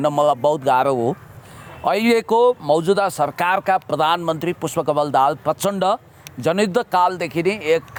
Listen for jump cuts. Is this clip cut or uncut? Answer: uncut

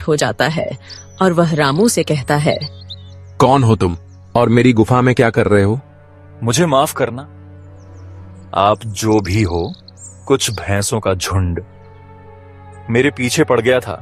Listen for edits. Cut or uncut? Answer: uncut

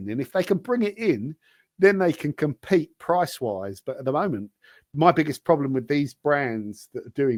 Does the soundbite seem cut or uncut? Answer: uncut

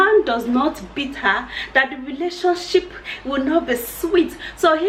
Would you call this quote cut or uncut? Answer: uncut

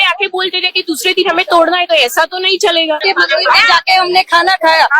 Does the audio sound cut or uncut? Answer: cut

